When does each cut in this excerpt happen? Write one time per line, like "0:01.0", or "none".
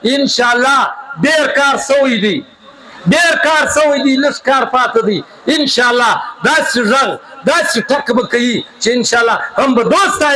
none